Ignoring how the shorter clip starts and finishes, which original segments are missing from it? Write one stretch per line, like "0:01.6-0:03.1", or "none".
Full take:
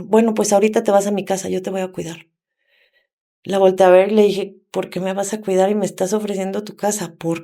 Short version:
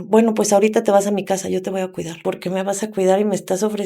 0:02.1-0:04.6

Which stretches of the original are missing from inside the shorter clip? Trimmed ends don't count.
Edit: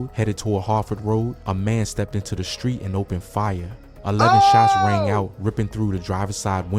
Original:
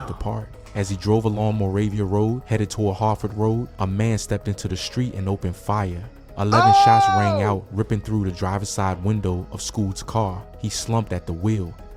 none

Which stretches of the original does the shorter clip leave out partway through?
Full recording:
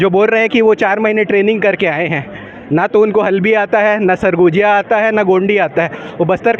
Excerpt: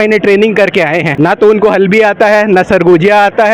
0:02.1-0:02.6

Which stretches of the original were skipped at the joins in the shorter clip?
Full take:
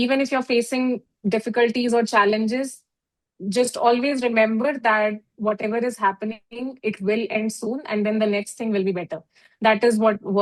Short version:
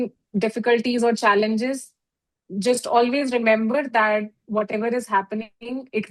none

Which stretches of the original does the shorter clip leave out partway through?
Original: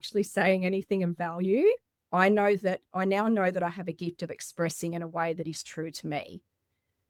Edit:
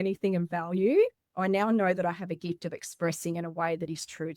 0:02.0-0:02.9

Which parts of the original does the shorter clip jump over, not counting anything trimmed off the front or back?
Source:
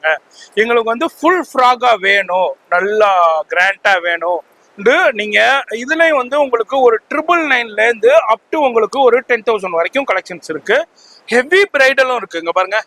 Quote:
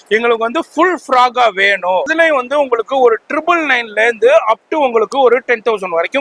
0:02.5-0:05.9

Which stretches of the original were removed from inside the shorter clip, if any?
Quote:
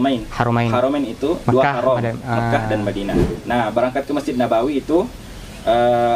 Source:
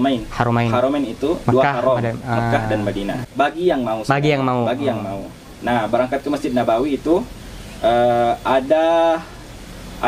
0:03.2-0:05.4

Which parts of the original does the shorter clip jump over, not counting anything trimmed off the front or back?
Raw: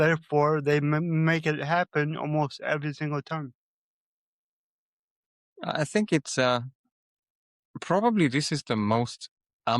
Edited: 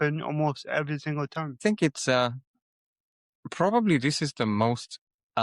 0:03.5-0:05.9

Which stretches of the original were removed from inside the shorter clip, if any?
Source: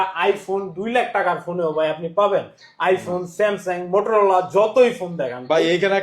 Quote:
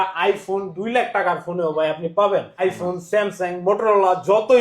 0:02.5-0:02.8

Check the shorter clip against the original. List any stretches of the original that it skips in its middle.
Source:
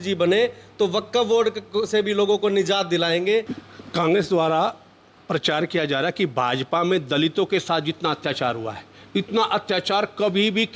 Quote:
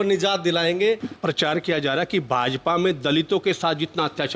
0:03.6-0:05.2

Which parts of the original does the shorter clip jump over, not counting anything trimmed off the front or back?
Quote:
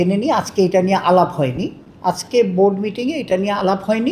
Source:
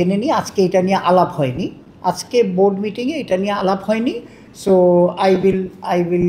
none

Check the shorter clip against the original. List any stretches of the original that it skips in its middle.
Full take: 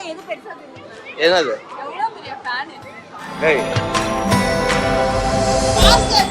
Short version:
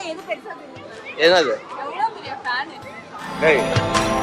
none

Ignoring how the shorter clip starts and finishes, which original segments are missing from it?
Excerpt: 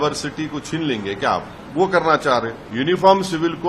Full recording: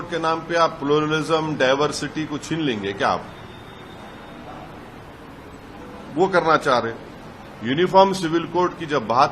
0:03.4-0:06.0
0:07.0-0:07.5

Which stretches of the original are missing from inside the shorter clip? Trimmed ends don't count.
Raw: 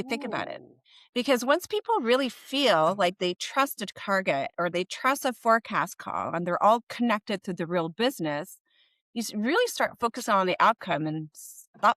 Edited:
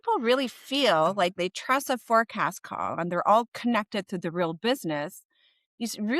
0:03.2-0:04.7

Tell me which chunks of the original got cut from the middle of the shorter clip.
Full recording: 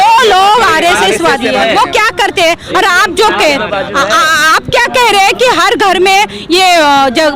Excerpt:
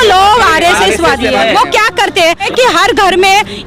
0:02.7-0:05.3

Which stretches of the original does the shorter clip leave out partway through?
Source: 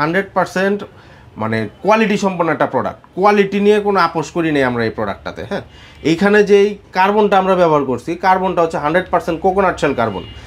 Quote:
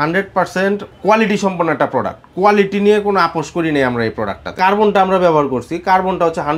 0:00.9-0:01.7
0:05.3-0:06.8

